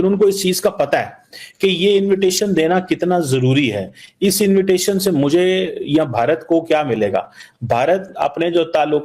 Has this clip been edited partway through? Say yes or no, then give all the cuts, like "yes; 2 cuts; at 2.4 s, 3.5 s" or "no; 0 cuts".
no; 0 cuts